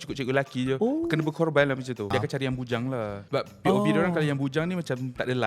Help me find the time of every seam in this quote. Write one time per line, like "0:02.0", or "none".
0:02.1